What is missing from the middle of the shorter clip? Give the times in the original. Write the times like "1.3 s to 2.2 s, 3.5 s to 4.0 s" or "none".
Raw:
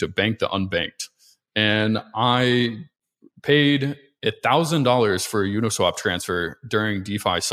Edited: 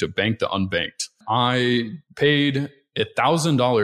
1.2 s to 2.1 s, 2.9 s to 3.3 s